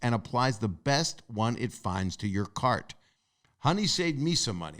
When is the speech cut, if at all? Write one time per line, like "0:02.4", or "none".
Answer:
0:03.2